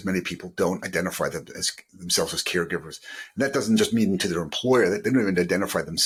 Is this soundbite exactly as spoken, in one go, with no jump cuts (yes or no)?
yes